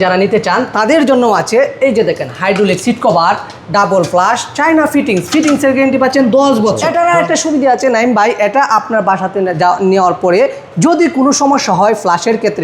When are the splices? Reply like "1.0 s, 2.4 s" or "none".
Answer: 6.8 s